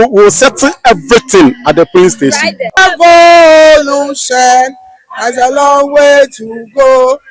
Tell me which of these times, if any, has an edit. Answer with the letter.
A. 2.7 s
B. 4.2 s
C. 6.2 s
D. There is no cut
A